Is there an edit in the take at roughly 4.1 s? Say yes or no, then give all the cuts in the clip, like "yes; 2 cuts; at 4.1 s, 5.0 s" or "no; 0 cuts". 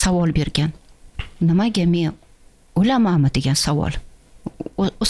no; 0 cuts